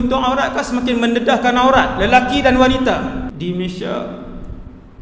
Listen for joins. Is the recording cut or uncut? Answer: cut